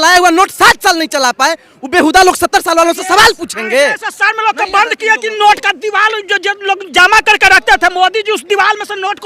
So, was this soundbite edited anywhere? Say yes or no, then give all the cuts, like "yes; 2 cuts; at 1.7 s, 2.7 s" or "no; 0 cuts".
no; 0 cuts